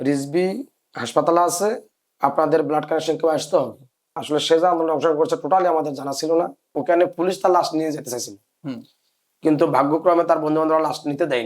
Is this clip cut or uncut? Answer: cut